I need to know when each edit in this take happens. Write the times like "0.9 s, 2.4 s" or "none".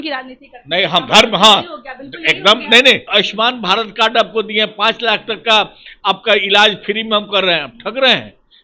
3.0 s